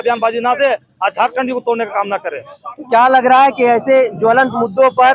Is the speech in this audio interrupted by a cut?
no; 0 cuts

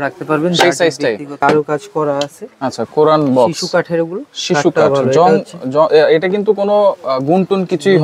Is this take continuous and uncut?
no; 1 cut; at 1.4 s

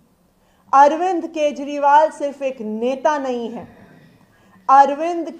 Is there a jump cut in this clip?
no; 0 cuts

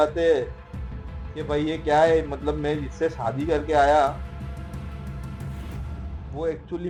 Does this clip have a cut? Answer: no; 0 cuts

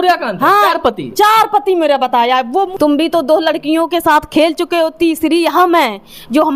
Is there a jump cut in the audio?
yes; 1 cut; at 2.6 s

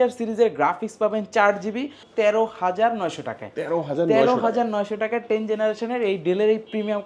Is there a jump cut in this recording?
yes; 1 cut; at 2.0 s

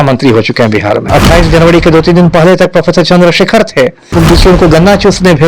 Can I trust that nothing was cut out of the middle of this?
no; 2 cuts; at 1.0 s, 4.0 s

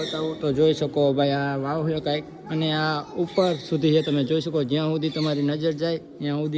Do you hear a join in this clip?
no; 0 cuts

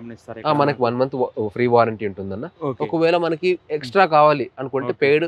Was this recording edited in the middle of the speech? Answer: no; 0 cuts

